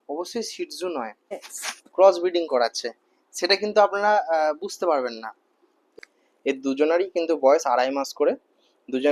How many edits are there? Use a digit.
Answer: 2